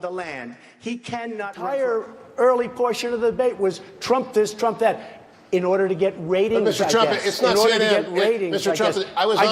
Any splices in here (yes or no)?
yes